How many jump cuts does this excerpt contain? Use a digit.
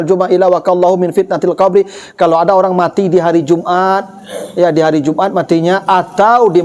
0